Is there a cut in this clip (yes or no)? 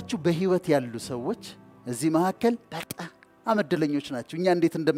no